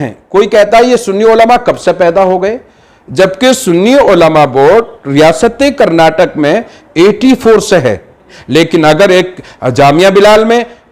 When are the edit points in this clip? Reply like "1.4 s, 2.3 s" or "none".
8.4 s